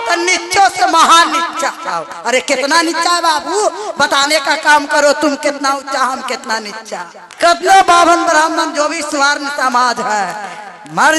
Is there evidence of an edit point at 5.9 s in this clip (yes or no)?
no